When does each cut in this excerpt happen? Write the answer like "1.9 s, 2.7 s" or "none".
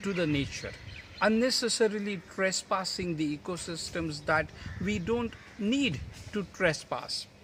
none